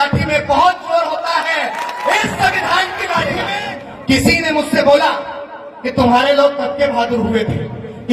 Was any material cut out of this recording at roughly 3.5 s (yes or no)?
yes